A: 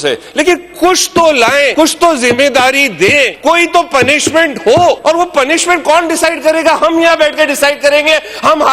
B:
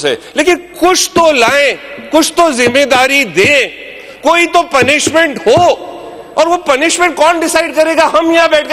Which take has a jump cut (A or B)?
A